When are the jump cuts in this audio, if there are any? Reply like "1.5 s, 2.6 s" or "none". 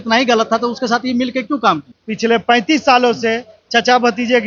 1.9 s

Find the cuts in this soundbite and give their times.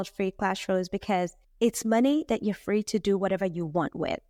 none

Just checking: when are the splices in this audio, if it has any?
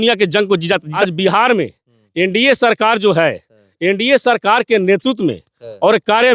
0.9 s

